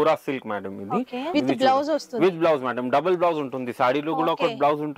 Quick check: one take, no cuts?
no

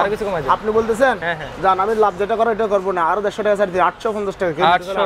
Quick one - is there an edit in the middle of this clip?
no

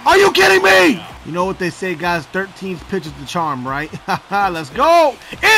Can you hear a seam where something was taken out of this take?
yes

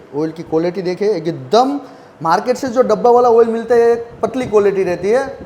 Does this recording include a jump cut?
no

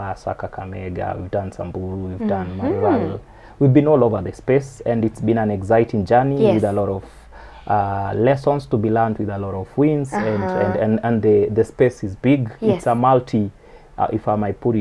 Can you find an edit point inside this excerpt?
no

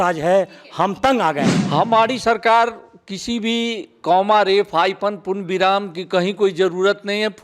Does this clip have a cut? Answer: yes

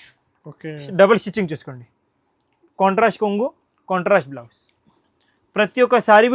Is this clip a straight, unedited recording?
yes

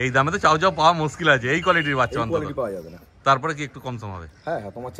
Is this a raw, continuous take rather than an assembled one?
yes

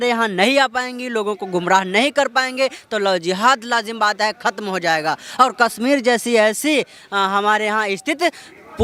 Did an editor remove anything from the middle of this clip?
no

